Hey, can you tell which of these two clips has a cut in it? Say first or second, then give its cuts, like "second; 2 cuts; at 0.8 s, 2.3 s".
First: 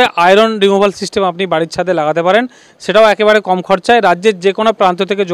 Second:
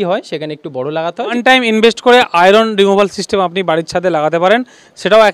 second; 1 cut; at 1.3 s